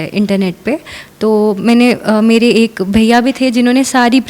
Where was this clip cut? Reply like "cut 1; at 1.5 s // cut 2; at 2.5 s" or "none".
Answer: none